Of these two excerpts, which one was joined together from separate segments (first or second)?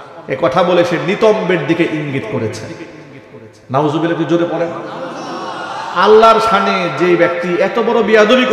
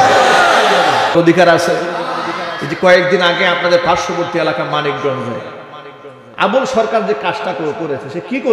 second